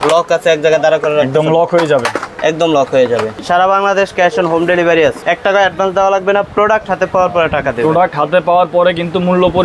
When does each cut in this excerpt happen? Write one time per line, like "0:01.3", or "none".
0:03.4
0:05.2